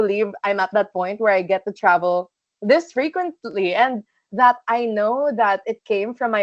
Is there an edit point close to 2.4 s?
no; 0 cuts

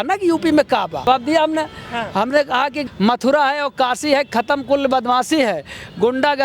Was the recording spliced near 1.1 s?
yes; 2 cuts; at 1.1 s, 2.8 s

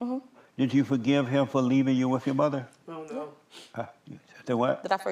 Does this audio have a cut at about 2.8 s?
no; 0 cuts

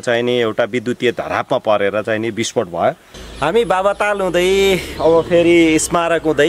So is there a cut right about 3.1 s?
yes; 1 cut; at 3.1 s

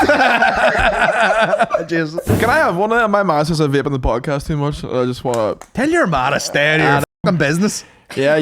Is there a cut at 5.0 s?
no; 1 cut; at 2.2 s

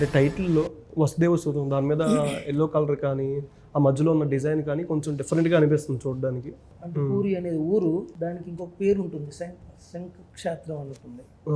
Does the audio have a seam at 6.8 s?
yes; 2 cuts; at 6.8 s, 8.1 s

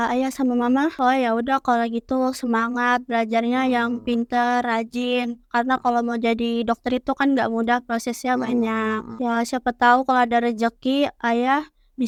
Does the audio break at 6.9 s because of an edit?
no; 0 cuts

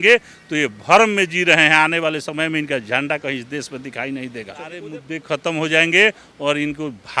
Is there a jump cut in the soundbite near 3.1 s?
no; 1 cut; at 4.9 s

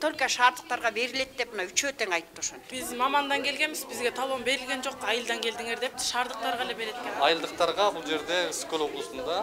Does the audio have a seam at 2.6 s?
yes; 2 cuts; at 2.6 s, 7.1 s

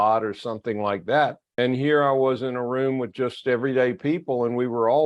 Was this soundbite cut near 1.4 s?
yes; 1 cut; at 1.4 s

